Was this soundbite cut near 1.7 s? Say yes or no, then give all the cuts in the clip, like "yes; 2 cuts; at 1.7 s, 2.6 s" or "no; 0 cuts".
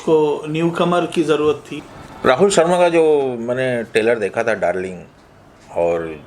yes; 1 cut; at 1.7 s